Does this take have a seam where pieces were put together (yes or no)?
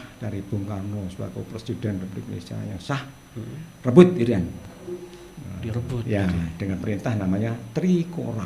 no